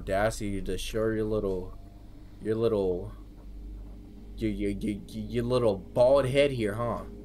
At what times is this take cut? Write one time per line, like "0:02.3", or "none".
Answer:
none